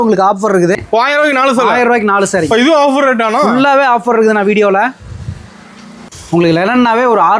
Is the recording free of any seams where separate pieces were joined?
no; 2 cuts; at 0.8 s, 6.0 s

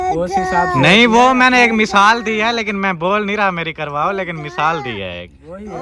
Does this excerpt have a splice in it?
no; 0 cuts

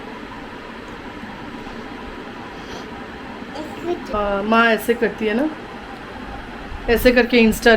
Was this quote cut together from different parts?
yes; 1 cut; at 4.1 s

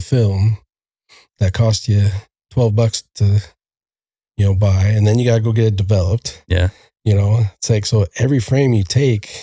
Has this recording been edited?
no; 0 cuts

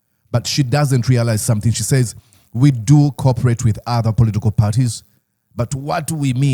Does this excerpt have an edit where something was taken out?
no; 0 cuts

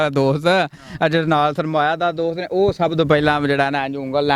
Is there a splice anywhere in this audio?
no; 0 cuts

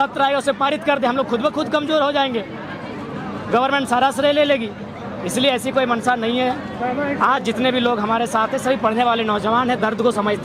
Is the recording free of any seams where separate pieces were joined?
yes; 0 cuts

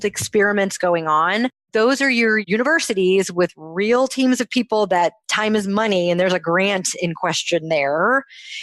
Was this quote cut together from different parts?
yes; 2 cuts; at 1.6 s, 2.4 s

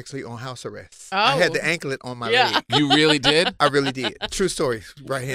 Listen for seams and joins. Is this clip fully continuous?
no; 1 cut; at 0.9 s

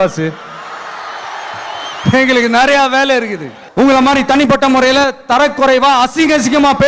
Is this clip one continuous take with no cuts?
no; 1 cut; at 3.6 s

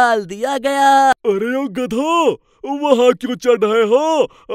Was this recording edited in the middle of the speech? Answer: yes; 1 cut; at 1.1 s

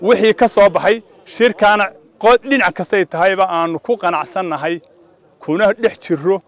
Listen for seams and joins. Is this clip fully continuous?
yes; 0 cuts

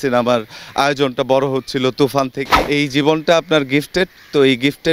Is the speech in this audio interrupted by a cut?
yes; 1 cut; at 2.5 s

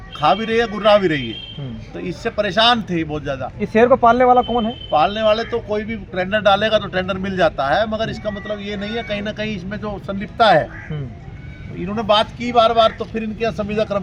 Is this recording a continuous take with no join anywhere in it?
yes; 0 cuts

